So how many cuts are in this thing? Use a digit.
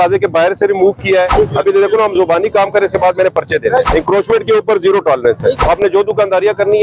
3